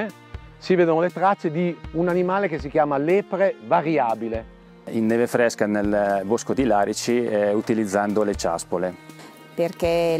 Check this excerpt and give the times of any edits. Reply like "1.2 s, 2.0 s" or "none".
4.9 s, 9.1 s